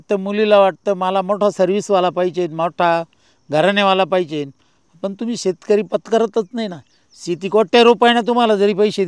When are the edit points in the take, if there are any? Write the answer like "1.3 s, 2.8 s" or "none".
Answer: none